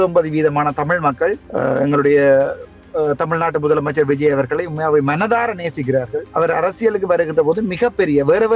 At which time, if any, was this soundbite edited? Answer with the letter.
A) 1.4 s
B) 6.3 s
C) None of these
B